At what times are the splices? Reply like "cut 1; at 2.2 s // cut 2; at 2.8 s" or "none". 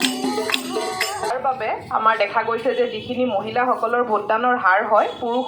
cut 1; at 1.3 s